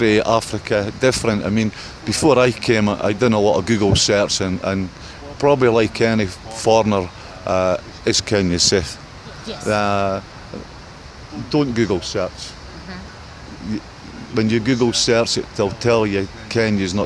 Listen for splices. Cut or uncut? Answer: uncut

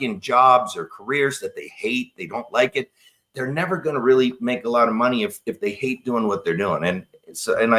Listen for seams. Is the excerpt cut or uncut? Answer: uncut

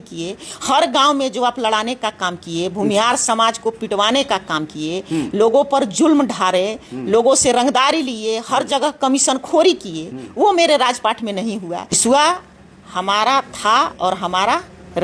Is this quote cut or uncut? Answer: cut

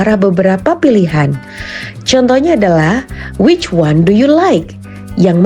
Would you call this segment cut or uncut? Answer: cut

